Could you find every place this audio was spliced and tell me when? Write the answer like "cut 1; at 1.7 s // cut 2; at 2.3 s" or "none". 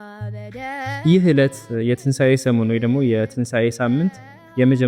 cut 1; at 1.0 s